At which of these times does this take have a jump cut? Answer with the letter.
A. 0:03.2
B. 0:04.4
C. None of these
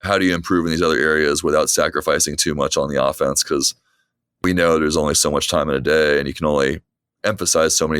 B